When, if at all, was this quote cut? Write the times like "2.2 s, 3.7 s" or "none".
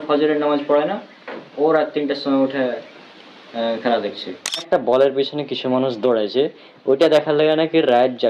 4.7 s